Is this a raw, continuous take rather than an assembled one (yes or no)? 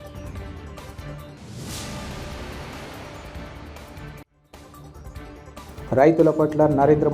no